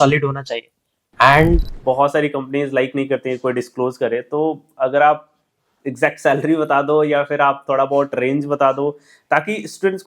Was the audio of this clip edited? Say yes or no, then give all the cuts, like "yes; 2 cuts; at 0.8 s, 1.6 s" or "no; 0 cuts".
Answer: yes; 1 cut; at 1.7 s